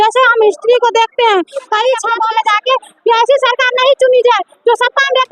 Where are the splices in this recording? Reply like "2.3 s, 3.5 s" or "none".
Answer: 2.1 s